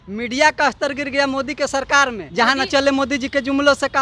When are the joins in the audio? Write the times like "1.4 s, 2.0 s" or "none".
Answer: 2.2 s